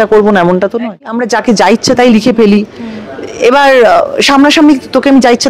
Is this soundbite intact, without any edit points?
no; 1 cut; at 1.2 s

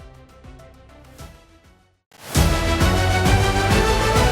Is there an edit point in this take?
yes; 1 cut; at 1.9 s

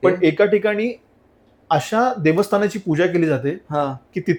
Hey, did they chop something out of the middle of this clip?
no; 0 cuts

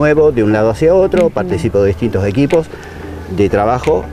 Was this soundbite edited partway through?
no; 0 cuts

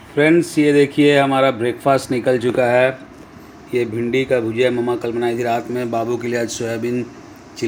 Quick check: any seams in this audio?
no; 0 cuts

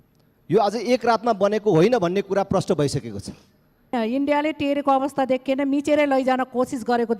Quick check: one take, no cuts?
no; 1 cut; at 3.9 s

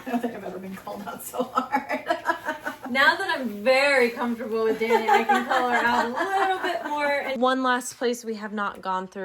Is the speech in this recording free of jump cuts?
no; 2 cuts; at 2.8 s, 7.4 s

